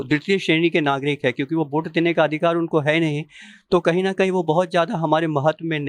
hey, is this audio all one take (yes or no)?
yes